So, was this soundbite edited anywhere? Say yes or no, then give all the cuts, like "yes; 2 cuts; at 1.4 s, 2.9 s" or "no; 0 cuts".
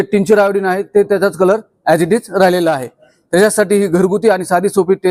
no; 0 cuts